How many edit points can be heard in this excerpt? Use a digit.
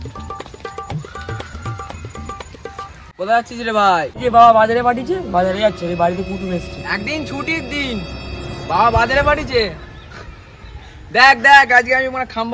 0